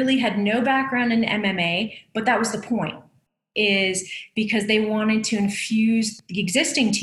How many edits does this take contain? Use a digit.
1